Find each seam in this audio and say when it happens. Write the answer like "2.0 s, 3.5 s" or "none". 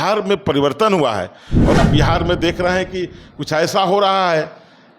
1.8 s